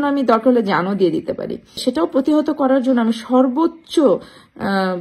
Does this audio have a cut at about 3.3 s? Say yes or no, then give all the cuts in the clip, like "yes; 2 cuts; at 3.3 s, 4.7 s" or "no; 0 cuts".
no; 1 cut; at 1.8 s